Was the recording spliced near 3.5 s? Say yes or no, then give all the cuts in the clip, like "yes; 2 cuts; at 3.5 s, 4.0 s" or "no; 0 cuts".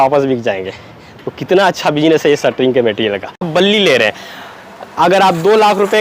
yes; 1 cut; at 3.5 s